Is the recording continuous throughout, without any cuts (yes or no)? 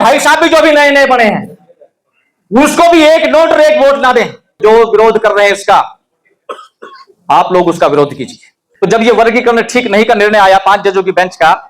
no